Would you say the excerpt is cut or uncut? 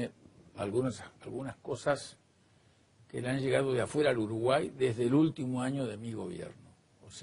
cut